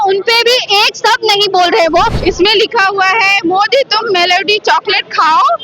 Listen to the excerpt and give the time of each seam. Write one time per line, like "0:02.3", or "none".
0:02.2